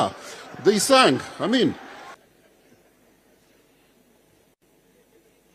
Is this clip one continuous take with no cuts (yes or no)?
no